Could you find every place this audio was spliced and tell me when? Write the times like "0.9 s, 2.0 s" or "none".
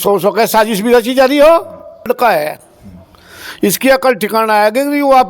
2.1 s